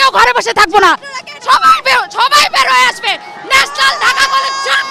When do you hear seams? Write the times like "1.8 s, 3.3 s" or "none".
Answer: none